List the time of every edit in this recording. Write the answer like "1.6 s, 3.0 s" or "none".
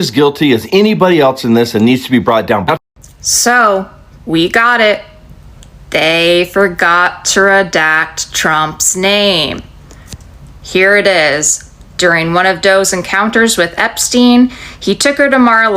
2.8 s